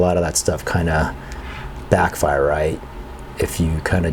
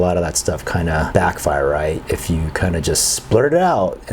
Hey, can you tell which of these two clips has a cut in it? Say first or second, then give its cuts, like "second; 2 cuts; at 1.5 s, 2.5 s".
second; 2 cuts; at 1.1 s, 2.0 s